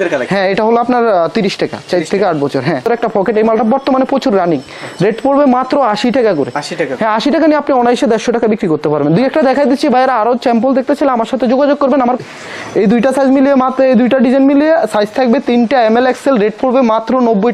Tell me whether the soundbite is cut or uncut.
cut